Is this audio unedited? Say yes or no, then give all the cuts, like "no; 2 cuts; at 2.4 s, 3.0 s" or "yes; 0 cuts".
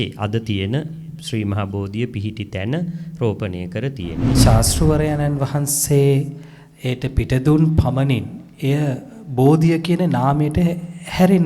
no; 1 cut; at 4.4 s